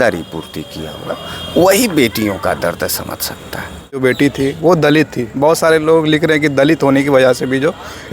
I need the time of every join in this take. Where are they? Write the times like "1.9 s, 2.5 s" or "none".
4.0 s